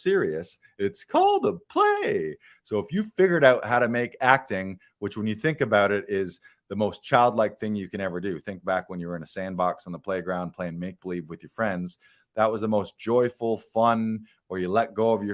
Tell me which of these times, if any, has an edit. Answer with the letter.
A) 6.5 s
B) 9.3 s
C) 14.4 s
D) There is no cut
D